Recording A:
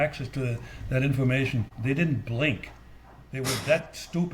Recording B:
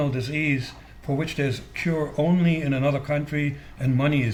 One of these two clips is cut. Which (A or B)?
A